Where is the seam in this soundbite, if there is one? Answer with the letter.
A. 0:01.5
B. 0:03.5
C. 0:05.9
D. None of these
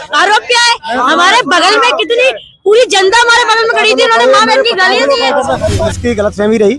C